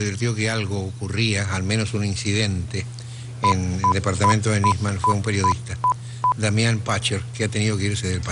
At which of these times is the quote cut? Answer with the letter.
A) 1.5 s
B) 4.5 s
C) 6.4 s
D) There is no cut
D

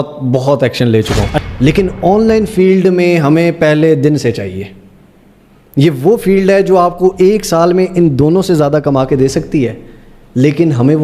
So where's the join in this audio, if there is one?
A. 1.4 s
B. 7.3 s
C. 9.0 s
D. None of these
A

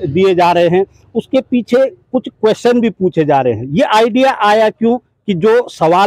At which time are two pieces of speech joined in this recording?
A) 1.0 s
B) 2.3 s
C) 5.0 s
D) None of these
D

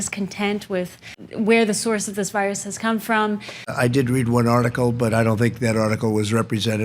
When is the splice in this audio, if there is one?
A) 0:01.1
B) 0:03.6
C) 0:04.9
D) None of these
B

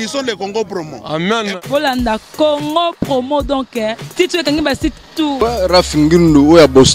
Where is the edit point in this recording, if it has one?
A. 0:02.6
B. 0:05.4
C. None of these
B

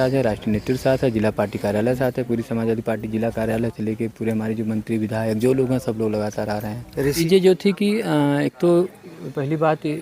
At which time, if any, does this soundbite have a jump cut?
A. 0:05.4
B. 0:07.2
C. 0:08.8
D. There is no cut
B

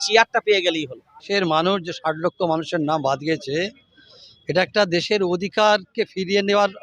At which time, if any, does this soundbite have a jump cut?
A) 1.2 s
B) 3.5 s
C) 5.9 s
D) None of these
A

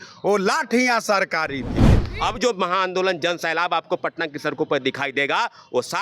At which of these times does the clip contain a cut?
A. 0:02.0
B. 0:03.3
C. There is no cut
A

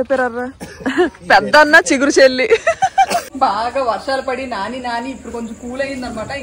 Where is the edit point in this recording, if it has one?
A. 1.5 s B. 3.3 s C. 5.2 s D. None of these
B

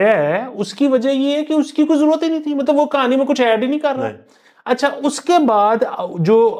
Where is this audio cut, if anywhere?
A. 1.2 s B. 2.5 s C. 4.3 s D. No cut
D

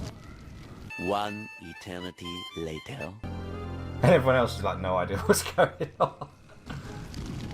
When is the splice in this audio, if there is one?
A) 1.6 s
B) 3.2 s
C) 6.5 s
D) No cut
B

